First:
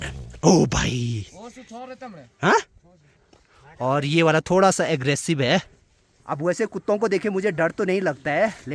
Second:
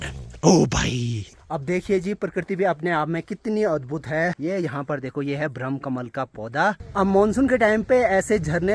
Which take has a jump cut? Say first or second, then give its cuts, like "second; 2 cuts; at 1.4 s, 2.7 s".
second; 3 cuts; at 1.3 s, 4.4 s, 6.8 s